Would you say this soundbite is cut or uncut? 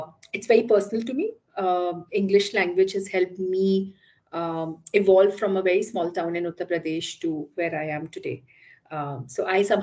uncut